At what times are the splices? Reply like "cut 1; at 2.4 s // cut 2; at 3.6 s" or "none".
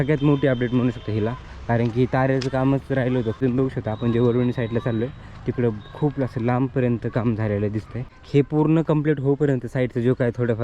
cut 1; at 3.4 s // cut 2; at 8.2 s